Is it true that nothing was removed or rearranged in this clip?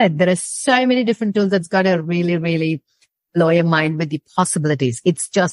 yes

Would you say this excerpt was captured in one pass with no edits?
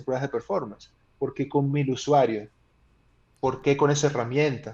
yes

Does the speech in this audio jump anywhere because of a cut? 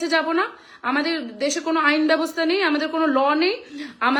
no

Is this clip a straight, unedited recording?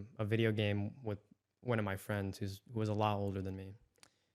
yes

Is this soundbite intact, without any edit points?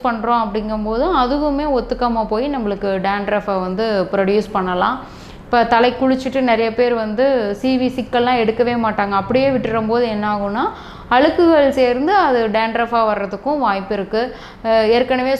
yes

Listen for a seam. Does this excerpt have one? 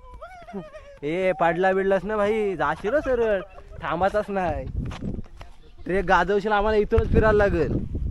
no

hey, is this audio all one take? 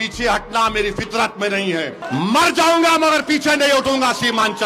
no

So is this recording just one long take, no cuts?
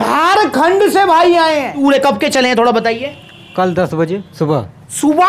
no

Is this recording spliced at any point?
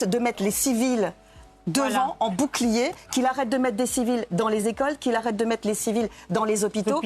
no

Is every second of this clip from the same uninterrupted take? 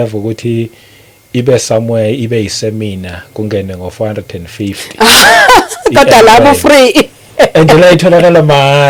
yes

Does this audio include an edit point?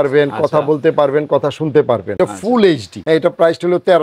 yes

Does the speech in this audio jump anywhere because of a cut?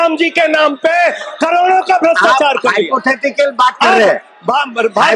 no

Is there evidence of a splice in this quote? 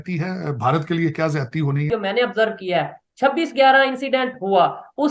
yes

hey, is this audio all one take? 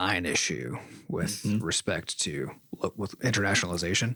yes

